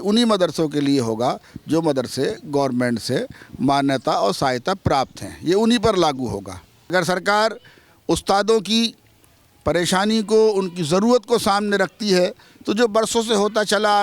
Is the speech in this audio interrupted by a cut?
yes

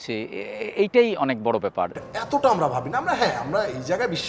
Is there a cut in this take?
yes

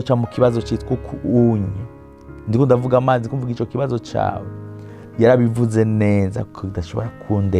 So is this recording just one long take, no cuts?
yes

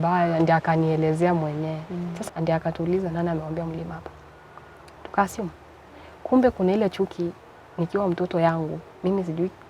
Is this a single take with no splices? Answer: no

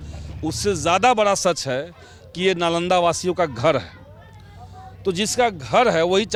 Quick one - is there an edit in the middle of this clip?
no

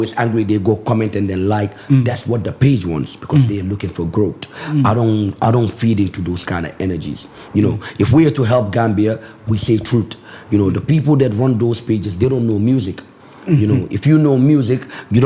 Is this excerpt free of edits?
yes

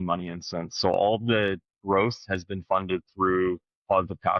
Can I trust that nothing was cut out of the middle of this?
yes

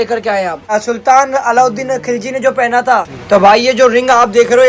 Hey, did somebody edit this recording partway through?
yes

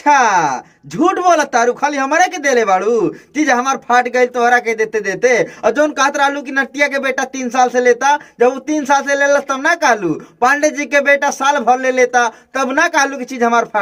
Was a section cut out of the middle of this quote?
no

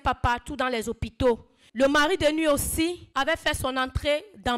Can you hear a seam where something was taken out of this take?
yes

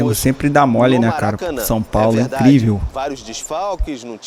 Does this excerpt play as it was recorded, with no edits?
yes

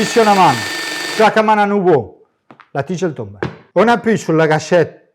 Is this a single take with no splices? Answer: no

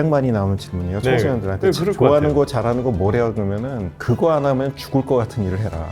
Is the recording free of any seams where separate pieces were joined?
yes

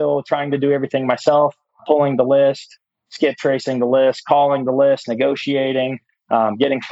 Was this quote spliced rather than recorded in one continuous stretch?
no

